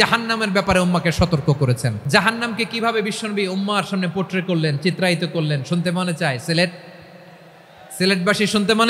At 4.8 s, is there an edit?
no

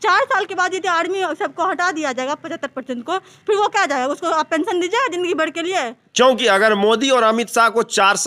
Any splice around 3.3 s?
no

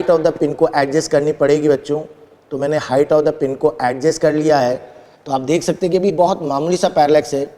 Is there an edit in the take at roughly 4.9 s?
no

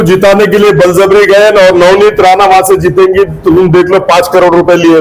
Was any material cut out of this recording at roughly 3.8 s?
no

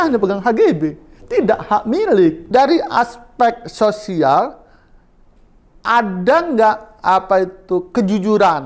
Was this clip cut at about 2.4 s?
yes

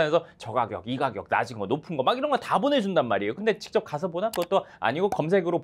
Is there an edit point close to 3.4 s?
yes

